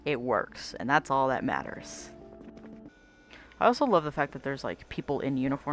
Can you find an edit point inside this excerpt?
yes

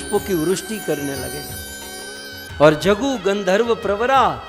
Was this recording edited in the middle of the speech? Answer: no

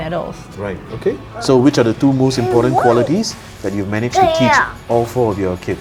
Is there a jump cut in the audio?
yes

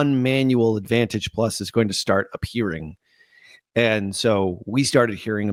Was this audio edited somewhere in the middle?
no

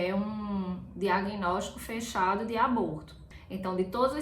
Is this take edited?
yes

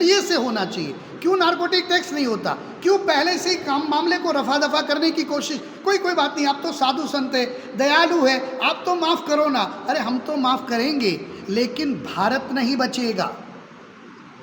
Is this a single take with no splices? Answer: yes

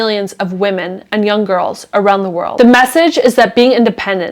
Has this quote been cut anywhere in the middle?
yes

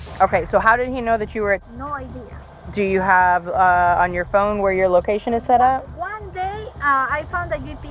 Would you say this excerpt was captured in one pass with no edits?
yes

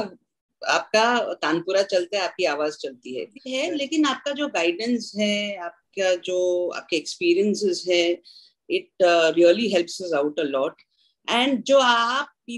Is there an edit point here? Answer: yes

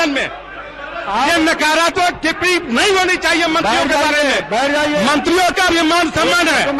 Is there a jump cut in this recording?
no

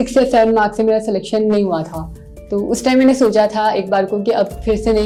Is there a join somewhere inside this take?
no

